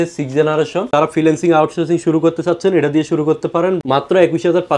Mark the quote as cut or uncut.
cut